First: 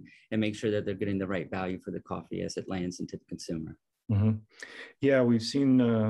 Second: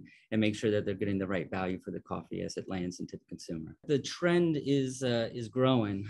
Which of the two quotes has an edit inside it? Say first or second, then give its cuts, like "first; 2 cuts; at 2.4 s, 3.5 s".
second; 1 cut; at 3.8 s